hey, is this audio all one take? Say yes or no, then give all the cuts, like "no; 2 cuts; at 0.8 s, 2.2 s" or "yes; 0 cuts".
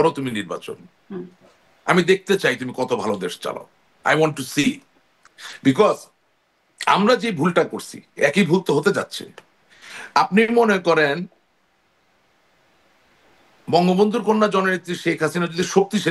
yes; 0 cuts